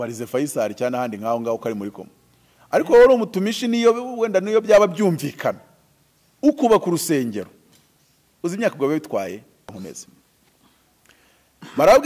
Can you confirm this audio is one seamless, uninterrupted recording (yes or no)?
no